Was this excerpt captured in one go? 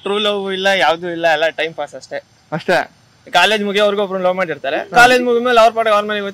yes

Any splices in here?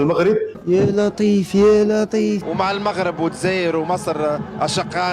yes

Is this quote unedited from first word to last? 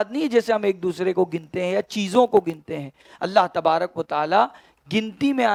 yes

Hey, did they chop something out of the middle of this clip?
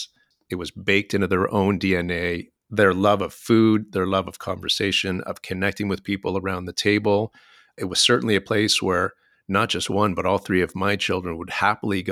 yes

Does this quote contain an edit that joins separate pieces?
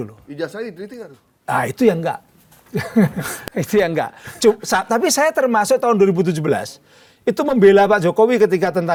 no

